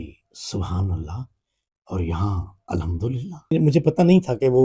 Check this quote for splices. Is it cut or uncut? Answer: cut